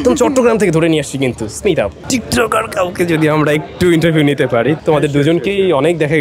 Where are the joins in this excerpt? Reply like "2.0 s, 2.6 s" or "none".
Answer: 2.0 s, 4.8 s